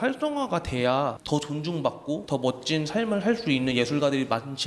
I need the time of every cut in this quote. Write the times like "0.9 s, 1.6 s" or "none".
1.2 s, 2.2 s